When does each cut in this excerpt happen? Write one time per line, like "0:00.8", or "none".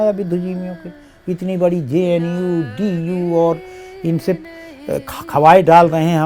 none